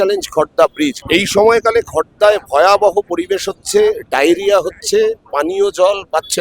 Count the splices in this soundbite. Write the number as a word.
one